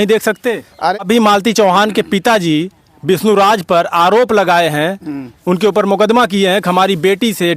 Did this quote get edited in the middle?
yes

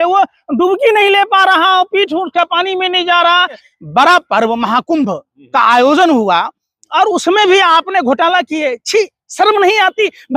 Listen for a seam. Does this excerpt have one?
yes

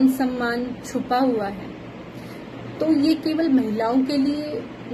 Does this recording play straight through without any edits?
yes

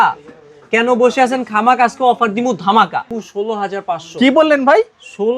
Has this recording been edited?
yes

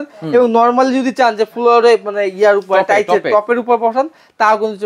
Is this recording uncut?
yes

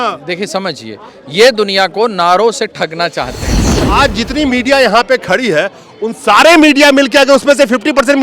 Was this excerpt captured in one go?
no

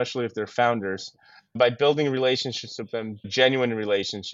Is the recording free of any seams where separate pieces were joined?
no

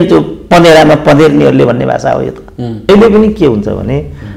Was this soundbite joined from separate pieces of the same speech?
yes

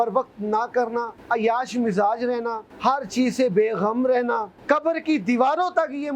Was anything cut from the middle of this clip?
yes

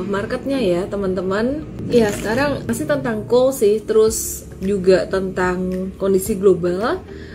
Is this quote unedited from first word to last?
no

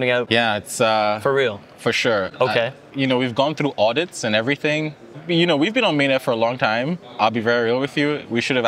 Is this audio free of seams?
yes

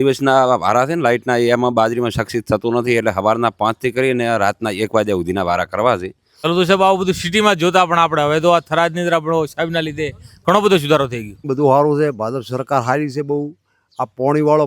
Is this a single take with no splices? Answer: no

